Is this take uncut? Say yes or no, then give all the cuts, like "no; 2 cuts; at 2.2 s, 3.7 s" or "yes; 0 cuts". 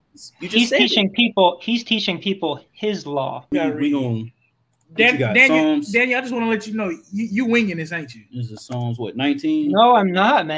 no; 1 cut; at 3.5 s